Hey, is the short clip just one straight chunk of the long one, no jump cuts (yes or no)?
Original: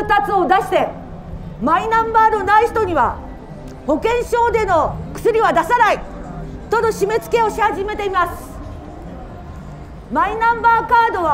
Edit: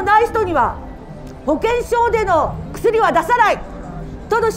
yes